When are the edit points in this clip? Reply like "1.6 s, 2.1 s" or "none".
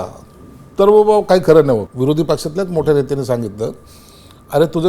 1.9 s